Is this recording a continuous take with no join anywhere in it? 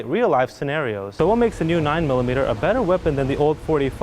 no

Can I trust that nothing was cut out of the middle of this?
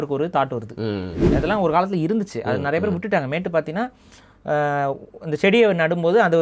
no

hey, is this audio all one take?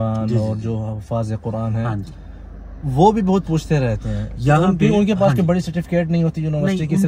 yes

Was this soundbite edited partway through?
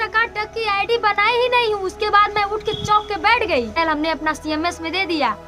yes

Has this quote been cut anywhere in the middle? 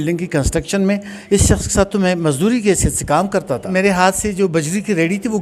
yes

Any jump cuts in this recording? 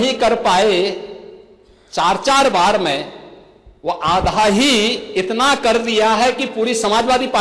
no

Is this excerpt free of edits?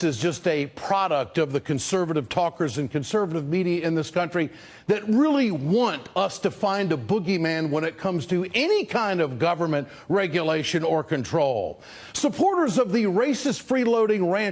yes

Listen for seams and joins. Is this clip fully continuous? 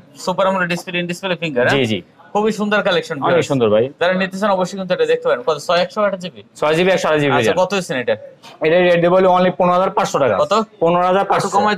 yes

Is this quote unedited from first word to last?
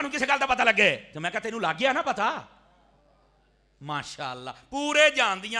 yes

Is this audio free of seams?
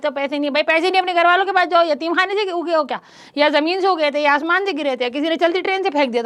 yes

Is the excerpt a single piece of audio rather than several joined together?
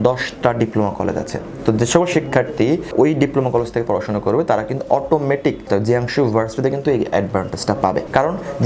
no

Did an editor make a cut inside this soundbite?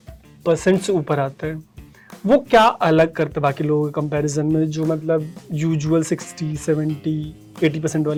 no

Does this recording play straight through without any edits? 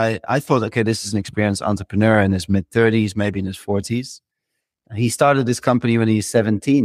yes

